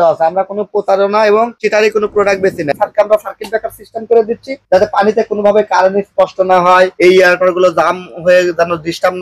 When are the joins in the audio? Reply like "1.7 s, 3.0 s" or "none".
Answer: 2.7 s

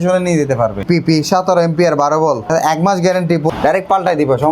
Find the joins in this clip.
0.8 s, 2.5 s, 3.5 s

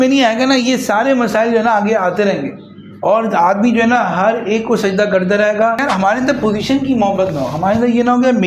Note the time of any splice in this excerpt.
5.8 s

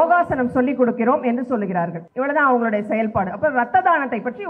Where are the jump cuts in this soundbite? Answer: 2.0 s

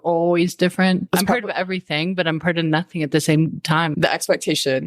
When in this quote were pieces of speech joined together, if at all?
1.0 s, 3.9 s

